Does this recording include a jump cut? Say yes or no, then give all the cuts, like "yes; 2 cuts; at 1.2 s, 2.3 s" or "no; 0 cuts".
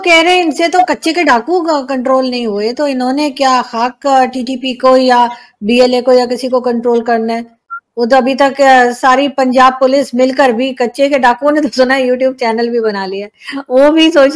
no; 0 cuts